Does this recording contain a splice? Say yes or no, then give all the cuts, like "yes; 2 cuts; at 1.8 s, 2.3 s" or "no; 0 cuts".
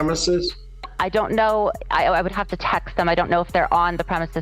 no; 0 cuts